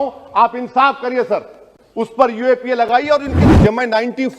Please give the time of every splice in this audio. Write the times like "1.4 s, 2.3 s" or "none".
3.5 s